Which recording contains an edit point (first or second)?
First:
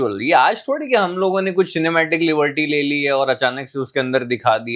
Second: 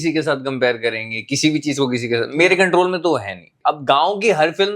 second